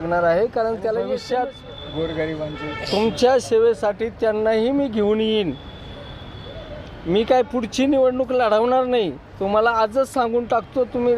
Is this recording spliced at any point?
yes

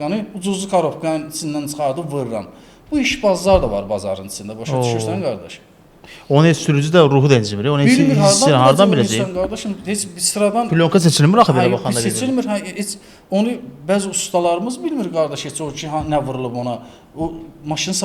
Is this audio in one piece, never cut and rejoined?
yes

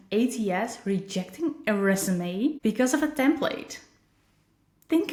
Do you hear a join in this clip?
no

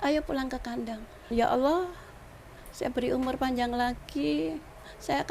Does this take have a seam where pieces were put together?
yes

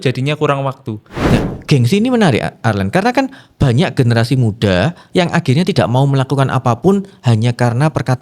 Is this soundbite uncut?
no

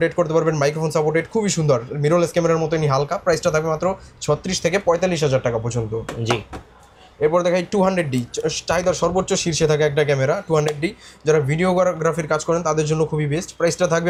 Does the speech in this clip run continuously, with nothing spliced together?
yes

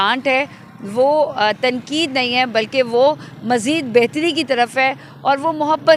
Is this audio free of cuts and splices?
yes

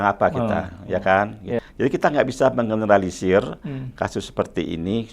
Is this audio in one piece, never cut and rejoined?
no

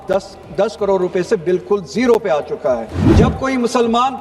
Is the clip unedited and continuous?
no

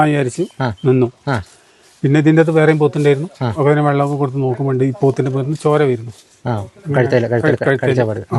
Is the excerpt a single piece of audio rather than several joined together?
yes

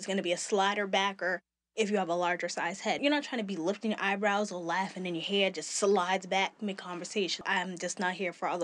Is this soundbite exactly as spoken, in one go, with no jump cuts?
no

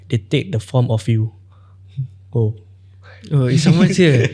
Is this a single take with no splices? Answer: yes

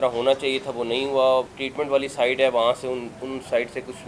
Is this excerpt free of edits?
no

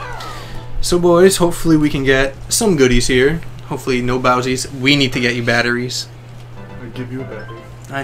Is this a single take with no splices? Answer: yes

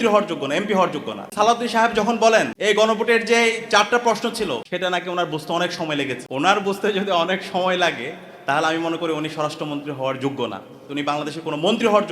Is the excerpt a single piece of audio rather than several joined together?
no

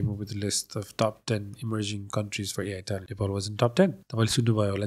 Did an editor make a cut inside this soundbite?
yes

